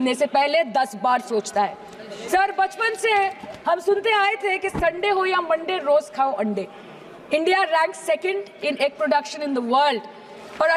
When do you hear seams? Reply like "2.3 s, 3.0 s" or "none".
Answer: none